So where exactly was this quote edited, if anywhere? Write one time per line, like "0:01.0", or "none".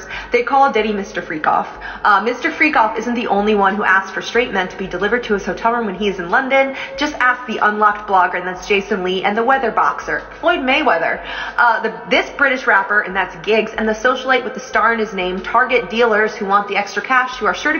none

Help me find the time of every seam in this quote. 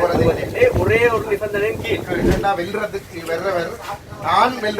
0:02.3

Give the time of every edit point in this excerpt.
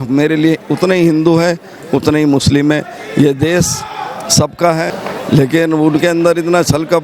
0:05.0

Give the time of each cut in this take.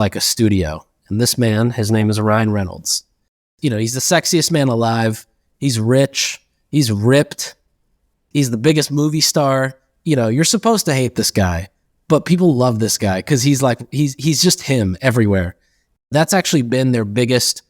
0:03.5

